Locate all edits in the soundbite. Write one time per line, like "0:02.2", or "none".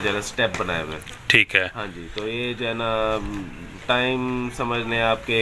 none